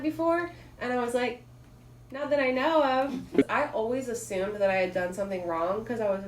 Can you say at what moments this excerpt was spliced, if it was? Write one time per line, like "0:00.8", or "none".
0:03.4